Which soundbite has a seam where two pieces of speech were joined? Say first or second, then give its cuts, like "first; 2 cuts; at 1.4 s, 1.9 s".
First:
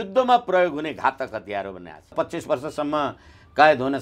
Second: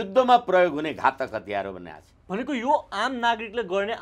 first; 1 cut; at 2.1 s